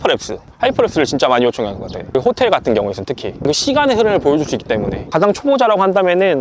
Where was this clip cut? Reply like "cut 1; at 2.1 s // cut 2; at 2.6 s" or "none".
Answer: cut 1; at 5.0 s